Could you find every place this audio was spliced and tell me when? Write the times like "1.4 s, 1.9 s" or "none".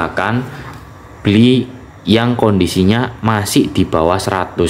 none

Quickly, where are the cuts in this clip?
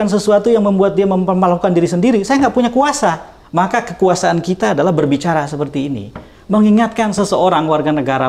3.3 s

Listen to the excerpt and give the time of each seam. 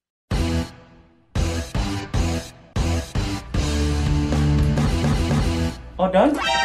2.6 s

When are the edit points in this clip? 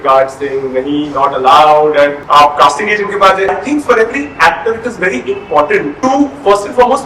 2.2 s, 3.5 s, 5.9 s

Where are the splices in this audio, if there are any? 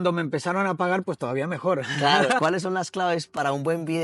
2.4 s

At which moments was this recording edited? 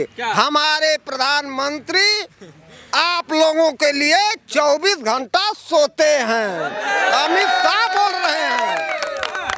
none

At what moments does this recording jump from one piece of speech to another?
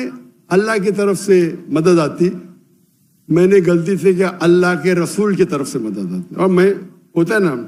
none

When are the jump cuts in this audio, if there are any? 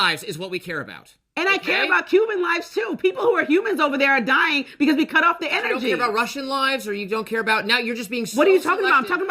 1.1 s

